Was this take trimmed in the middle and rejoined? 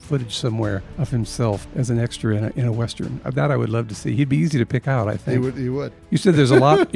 yes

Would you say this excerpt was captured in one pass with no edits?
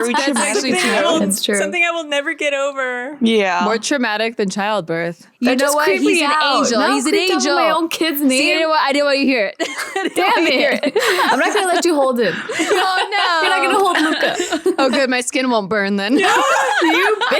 no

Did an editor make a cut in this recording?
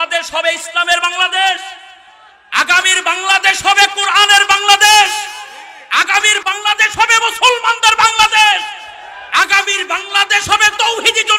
yes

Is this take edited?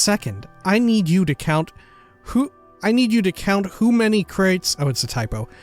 yes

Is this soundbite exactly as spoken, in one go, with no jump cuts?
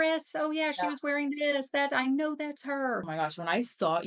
no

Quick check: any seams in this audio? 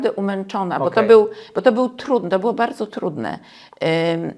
no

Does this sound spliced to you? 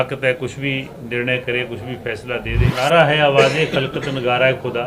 yes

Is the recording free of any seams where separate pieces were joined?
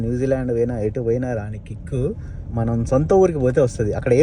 no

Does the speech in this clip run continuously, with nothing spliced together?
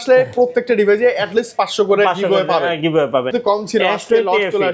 no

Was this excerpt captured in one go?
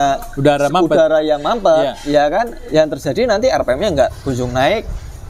yes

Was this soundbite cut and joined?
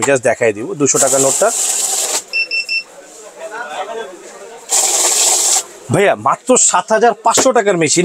no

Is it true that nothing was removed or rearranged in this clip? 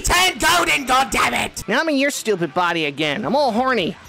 no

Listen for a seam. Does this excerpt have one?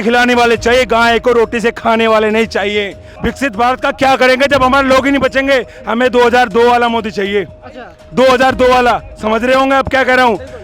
yes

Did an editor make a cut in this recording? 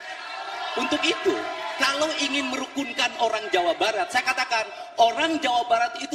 no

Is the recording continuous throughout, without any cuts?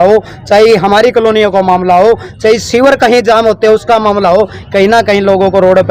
yes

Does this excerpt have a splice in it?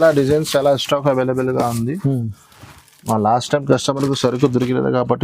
no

